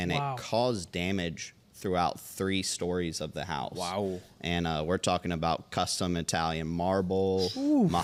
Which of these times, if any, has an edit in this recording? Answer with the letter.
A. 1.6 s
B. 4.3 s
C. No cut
C